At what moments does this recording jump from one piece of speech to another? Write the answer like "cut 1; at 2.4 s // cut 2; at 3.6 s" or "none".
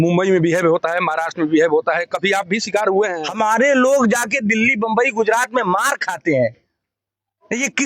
cut 1; at 3.1 s